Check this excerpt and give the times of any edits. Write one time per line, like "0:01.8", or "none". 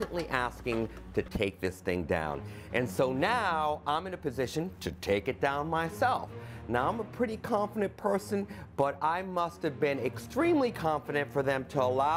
0:06.4

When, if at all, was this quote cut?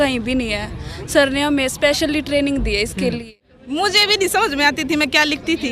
0:03.2

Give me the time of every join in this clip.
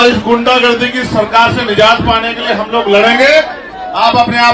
none

